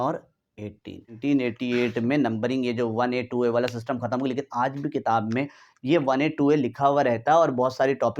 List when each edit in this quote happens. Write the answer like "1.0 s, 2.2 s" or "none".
1.2 s